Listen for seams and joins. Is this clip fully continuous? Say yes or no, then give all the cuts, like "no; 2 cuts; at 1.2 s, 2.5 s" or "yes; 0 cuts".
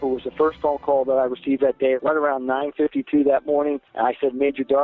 no; 2 cuts; at 2.0 s, 3.9 s